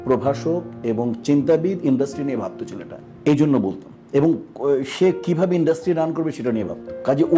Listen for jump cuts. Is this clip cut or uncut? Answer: uncut